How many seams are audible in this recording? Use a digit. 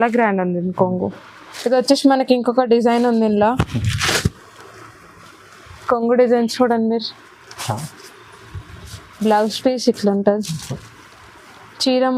1